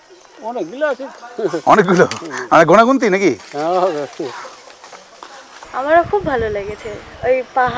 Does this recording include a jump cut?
yes; 1 cut; at 5.7 s

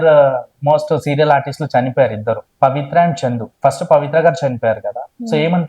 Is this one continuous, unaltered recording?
no; 2 cuts; at 2.5 s, 3.5 s

